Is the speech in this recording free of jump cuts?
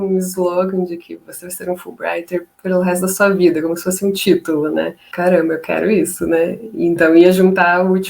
no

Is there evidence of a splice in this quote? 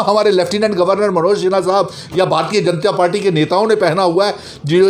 no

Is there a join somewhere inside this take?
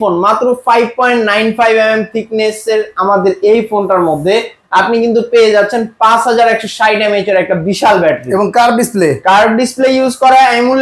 no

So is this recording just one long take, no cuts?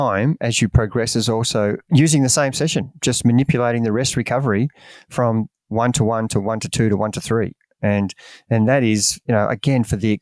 yes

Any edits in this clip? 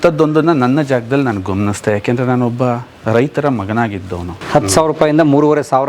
yes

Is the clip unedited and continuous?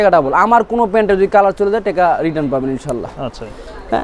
yes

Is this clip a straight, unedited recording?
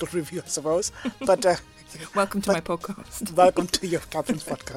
yes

